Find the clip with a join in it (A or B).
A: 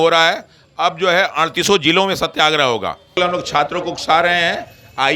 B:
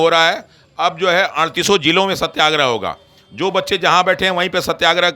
A